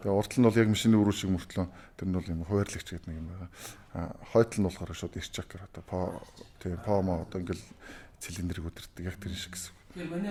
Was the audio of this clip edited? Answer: no; 0 cuts

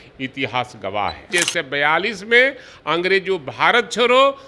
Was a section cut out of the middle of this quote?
yes; 1 cut; at 1.3 s

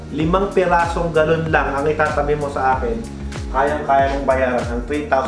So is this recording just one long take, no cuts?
yes; 0 cuts

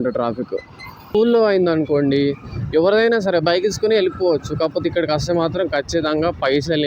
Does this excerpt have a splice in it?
yes; 1 cut; at 1.1 s

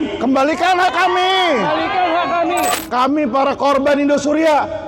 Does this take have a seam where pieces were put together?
yes; 1 cut; at 2.7 s

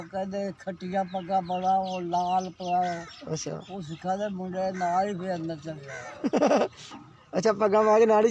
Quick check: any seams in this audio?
no; 0 cuts

